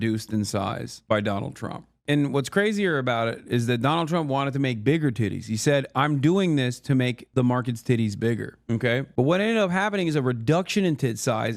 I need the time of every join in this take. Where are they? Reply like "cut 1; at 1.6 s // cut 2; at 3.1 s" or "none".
cut 1; at 9.1 s